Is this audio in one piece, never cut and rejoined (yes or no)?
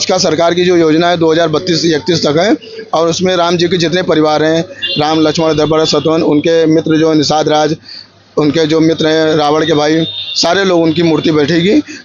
yes